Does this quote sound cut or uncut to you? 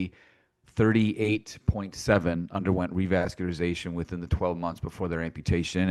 uncut